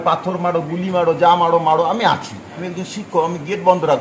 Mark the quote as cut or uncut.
cut